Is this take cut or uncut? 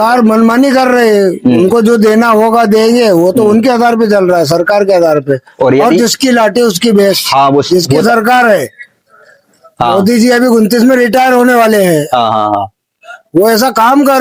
uncut